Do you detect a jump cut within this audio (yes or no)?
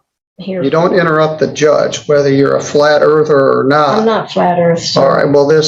no